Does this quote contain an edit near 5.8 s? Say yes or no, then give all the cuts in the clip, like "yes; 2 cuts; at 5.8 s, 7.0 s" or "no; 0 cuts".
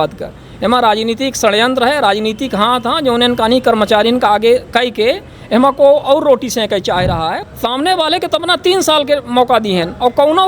no; 1 cut; at 7.3 s